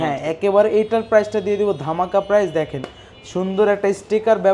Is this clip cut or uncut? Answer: uncut